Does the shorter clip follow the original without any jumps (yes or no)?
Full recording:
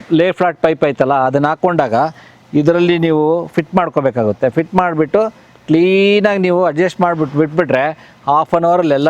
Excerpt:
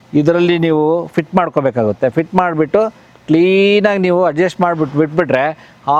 yes